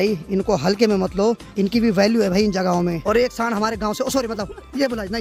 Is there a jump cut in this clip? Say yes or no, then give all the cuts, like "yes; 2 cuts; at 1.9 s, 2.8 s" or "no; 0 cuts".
no; 0 cuts